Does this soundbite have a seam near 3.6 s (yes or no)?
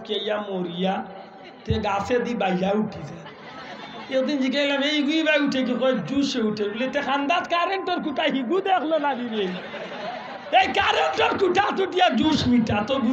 no